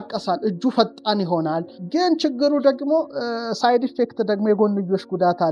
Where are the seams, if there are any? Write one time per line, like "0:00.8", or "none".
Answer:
0:01.7